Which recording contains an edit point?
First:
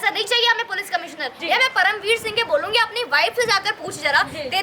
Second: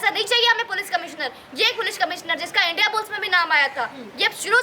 first; 1 cut; at 1.3 s

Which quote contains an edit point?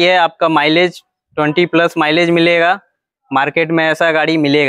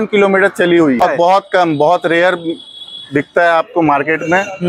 second; 1 cut; at 1.0 s

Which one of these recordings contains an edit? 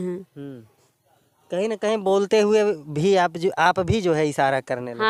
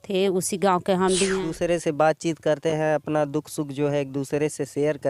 second; 1 cut; at 1.4 s

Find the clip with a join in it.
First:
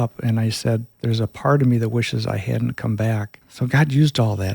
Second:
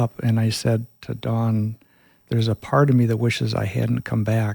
first; 2 cuts; at 0.9 s, 3.4 s

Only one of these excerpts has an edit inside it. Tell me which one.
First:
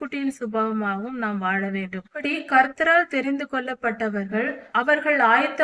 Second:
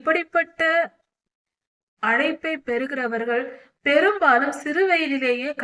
first; 2 cuts; at 2.2 s, 4.6 s

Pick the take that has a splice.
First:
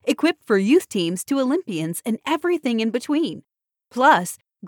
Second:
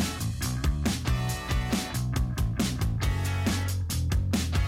second; 1 cut; at 2.3 s

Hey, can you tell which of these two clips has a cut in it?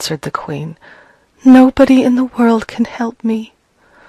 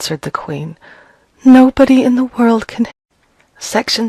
first; 1 cut; at 2.9 s

